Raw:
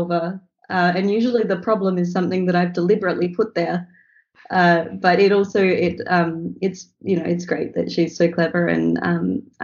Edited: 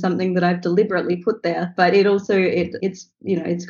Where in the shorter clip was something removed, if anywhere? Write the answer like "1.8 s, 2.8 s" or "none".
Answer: 1.7 s, 2.7 s